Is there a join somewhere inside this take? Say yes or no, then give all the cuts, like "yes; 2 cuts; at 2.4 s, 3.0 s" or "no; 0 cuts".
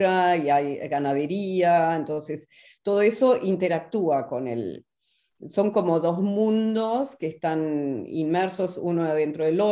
no; 0 cuts